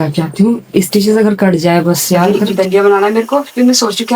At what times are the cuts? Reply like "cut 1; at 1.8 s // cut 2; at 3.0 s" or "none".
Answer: cut 1; at 2.4 s